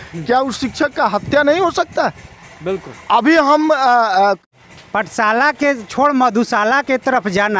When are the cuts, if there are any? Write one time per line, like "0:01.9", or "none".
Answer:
0:04.4